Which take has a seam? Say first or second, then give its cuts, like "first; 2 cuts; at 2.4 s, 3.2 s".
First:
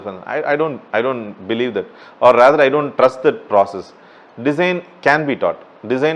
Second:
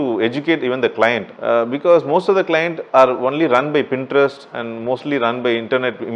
second; 2 cuts; at 1.3 s, 2.8 s